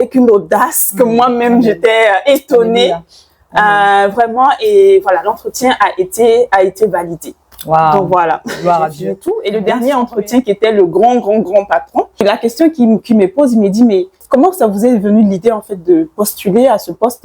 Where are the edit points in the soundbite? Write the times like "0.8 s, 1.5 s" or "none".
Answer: 9.1 s, 12.2 s, 14.2 s